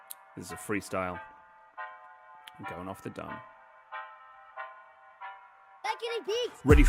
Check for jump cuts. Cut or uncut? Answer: uncut